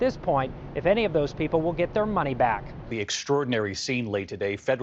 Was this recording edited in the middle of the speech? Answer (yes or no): yes